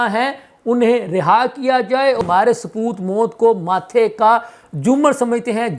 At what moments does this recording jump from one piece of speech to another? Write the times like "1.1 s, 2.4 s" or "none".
2.2 s